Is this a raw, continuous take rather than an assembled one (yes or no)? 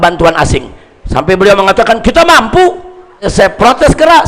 no